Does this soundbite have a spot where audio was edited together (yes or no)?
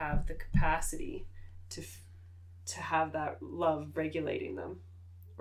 no